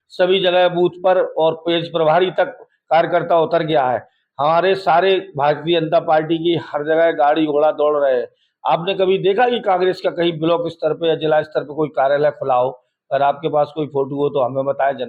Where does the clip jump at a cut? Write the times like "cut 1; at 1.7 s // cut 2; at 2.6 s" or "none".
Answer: none